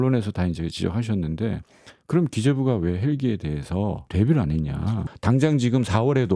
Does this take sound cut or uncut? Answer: cut